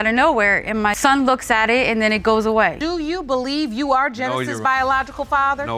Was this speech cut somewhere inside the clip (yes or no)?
yes